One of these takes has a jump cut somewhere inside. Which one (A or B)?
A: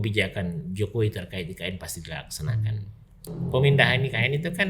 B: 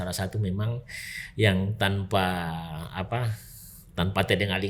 A